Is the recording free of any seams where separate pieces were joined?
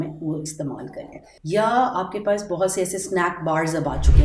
yes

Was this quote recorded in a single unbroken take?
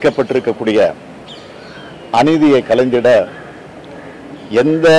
yes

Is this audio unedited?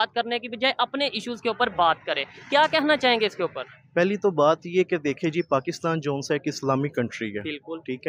yes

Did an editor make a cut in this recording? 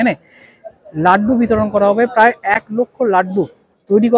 no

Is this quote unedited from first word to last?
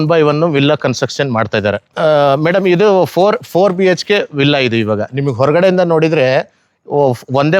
no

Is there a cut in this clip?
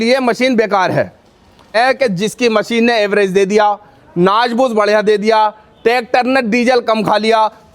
yes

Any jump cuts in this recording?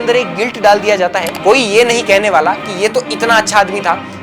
yes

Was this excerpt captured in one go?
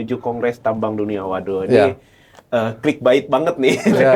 yes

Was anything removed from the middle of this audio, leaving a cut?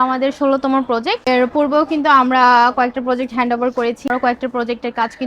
yes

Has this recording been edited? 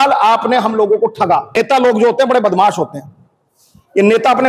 yes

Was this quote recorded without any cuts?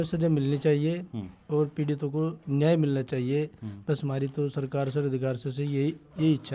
yes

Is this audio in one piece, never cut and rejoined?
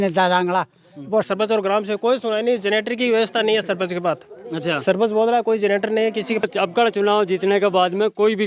no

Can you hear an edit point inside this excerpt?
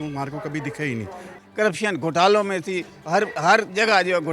yes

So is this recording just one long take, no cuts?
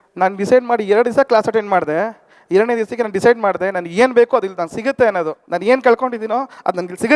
no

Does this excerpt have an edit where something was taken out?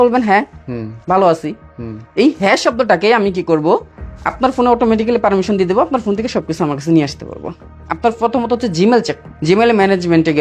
yes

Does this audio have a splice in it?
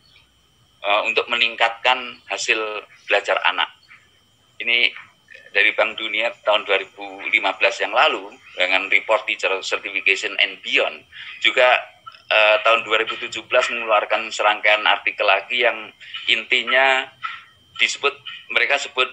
no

